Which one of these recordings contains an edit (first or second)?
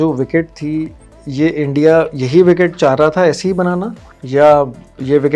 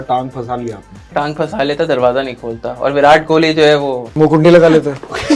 second